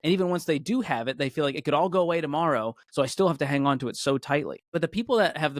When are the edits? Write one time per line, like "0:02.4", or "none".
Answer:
0:04.6